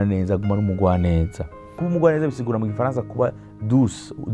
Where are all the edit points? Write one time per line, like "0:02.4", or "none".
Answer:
0:01.8